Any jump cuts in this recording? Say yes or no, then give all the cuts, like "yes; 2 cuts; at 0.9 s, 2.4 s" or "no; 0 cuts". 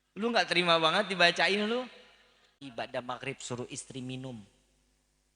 yes; 1 cut; at 2.7 s